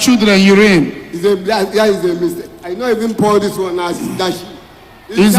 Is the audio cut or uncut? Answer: uncut